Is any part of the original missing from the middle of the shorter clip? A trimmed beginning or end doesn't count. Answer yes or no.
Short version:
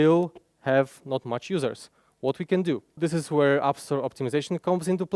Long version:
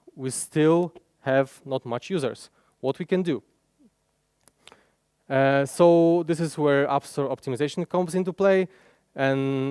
yes